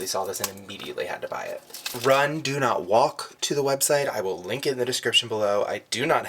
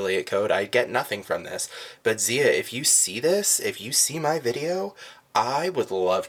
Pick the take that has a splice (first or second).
first